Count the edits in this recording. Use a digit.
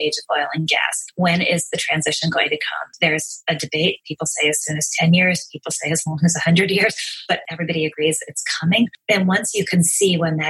4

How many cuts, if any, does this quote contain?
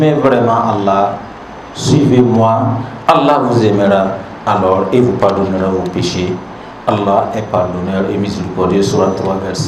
0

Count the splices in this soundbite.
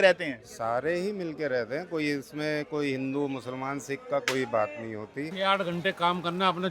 1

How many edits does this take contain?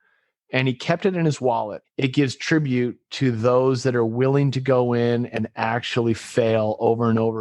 1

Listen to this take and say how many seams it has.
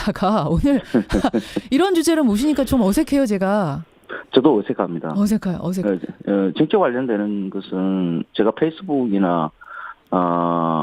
1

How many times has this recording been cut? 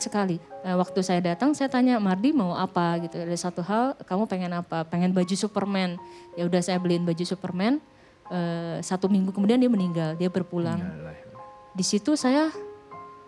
0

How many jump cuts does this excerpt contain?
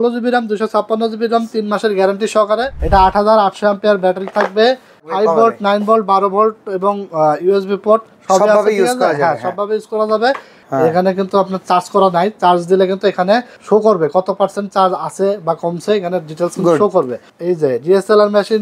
5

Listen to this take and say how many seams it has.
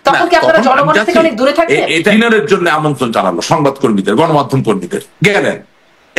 1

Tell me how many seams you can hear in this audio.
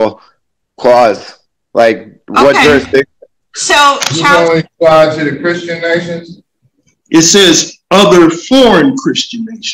2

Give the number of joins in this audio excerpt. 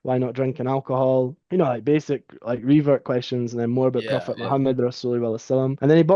0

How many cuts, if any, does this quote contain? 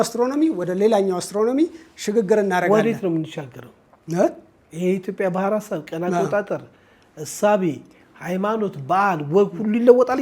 0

